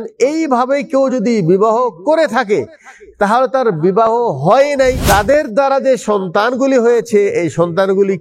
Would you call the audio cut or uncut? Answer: cut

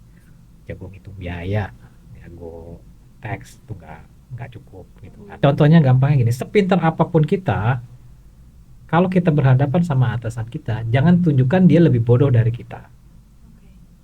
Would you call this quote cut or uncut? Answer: cut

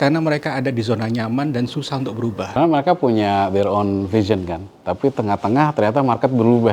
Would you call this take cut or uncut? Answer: cut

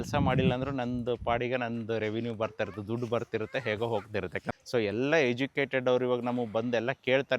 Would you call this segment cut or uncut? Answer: cut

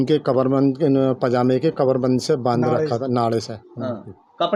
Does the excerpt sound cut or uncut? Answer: uncut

